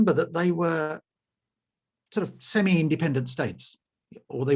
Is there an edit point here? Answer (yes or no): no